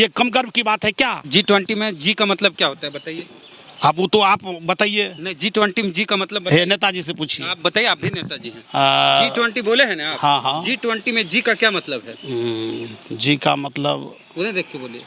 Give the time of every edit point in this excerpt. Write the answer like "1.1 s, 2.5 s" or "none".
1.3 s